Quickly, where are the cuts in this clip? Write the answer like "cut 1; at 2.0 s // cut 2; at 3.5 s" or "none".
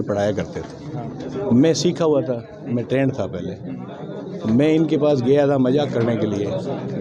none